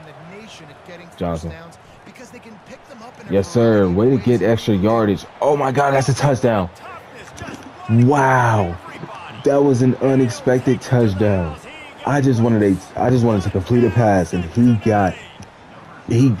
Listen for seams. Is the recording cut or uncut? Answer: uncut